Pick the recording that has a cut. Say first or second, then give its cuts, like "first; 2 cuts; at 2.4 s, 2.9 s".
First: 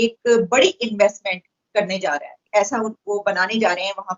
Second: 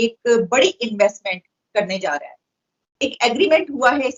first; 1 cut; at 2.5 s